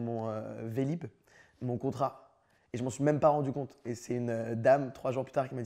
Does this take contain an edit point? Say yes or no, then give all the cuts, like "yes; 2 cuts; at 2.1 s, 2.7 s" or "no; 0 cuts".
no; 0 cuts